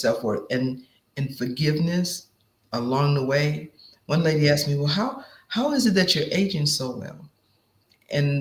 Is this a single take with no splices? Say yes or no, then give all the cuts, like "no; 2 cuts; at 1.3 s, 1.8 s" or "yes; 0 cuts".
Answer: yes; 0 cuts